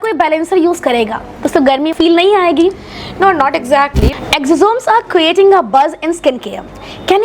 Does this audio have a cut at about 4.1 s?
yes; 1 cut; at 4.1 s

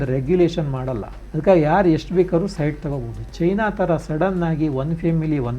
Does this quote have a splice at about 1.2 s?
yes; 1 cut; at 1.2 s

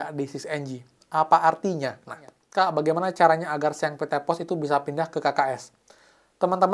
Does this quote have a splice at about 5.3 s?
no; 1 cut; at 2.4 s

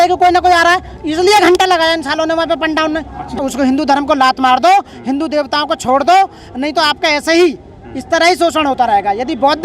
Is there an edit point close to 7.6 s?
no; 1 cut; at 3.3 s

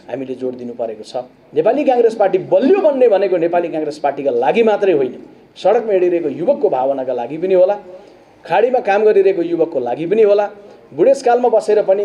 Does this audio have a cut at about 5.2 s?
no; 1 cut; at 1.4 s

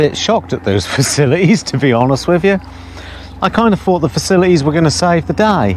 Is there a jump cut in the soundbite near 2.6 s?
no; 0 cuts

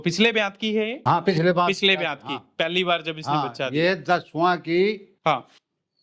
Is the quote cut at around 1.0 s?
yes; 1 cut; at 1.0 s

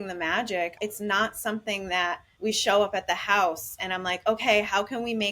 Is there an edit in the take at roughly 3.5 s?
no; 2 cuts; at 0.7 s, 2.3 s

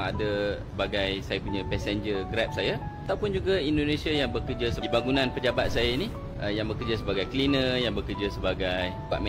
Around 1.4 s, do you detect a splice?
no; 0 cuts

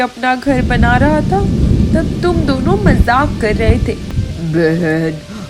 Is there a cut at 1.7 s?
no; 1 cut; at 4.1 s

